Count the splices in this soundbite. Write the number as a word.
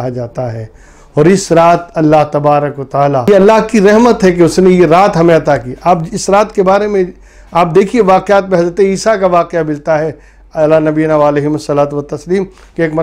one